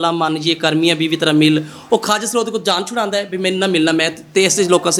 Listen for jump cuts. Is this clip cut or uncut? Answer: uncut